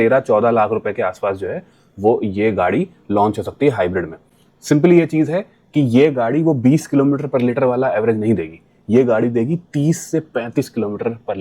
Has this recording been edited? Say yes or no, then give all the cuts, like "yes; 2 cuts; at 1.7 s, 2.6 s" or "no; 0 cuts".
no; 0 cuts